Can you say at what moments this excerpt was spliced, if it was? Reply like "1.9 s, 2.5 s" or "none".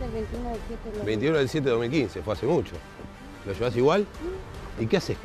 none